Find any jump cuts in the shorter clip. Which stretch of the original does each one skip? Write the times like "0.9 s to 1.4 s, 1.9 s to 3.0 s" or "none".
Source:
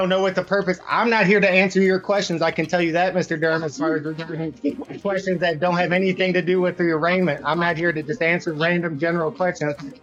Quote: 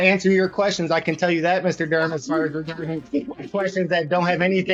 none